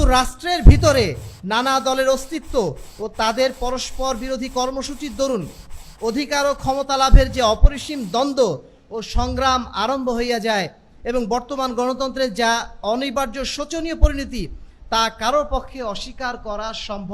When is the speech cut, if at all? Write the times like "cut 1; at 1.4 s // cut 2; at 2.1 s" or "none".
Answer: none